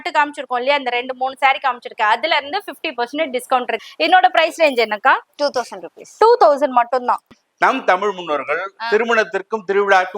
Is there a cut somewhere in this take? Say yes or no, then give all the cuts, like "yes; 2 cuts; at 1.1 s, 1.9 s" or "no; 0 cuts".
yes; 2 cuts; at 3.8 s, 7.3 s